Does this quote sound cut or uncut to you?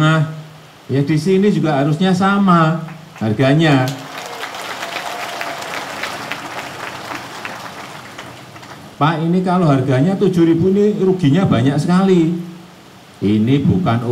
cut